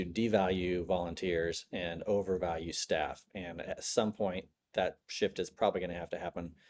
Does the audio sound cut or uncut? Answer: uncut